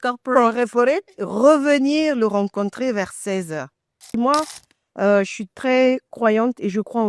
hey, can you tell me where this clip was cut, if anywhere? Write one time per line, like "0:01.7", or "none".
0:04.1